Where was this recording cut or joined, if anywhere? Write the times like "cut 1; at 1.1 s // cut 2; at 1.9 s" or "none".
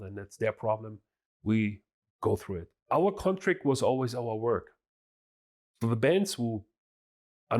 cut 1; at 2.7 s